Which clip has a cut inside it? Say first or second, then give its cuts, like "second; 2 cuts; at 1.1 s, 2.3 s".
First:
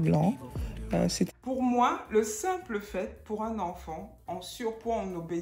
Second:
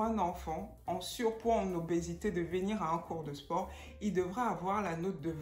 first; 1 cut; at 1.3 s